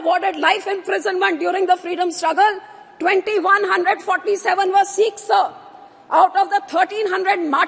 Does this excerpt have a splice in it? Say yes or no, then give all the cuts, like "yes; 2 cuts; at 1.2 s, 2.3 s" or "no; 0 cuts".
no; 0 cuts